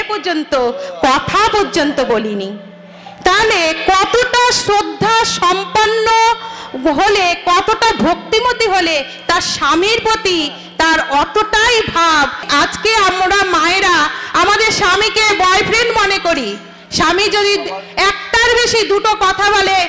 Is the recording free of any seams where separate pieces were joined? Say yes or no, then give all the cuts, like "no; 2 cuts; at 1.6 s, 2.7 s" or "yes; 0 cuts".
no; 1 cut; at 12.4 s